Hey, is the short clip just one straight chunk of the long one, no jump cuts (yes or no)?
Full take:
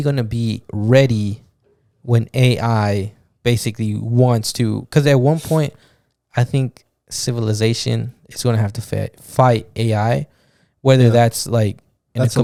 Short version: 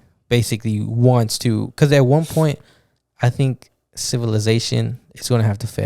yes